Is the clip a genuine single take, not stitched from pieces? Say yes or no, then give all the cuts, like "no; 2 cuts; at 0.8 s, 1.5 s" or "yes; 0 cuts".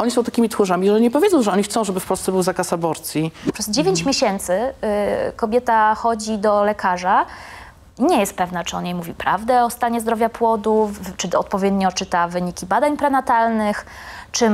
no; 1 cut; at 3.5 s